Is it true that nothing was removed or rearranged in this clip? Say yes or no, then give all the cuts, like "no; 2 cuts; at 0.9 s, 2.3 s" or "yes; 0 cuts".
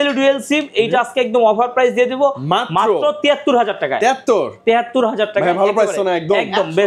yes; 0 cuts